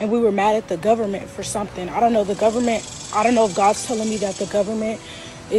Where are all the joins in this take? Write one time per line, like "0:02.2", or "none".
0:02.5